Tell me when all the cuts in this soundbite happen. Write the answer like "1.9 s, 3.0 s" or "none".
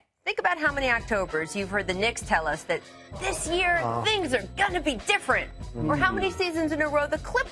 3.0 s